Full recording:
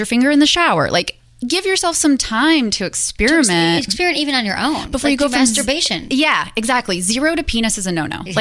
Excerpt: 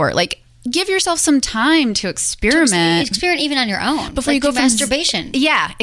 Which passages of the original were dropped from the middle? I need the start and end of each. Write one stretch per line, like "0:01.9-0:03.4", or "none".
none